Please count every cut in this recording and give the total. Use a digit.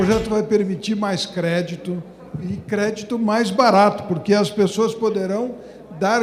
0